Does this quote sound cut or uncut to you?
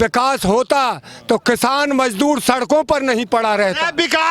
uncut